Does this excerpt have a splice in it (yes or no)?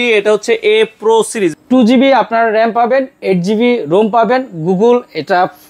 yes